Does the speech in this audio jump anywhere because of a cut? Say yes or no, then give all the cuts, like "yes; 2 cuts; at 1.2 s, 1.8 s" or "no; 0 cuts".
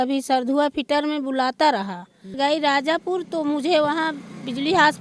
yes; 1 cut; at 2.3 s